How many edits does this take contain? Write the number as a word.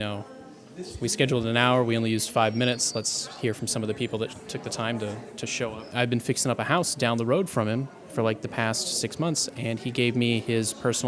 one